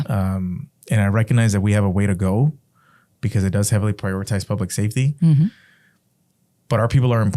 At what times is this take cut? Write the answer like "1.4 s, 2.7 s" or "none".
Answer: none